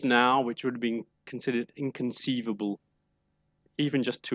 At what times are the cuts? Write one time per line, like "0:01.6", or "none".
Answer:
none